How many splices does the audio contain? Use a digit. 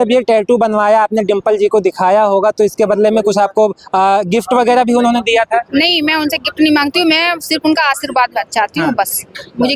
0